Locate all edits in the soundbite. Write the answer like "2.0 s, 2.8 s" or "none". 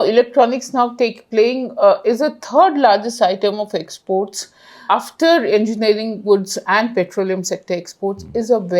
4.8 s